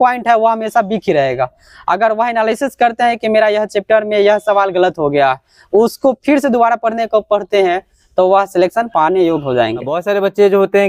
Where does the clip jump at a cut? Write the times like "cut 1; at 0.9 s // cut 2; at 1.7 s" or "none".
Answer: none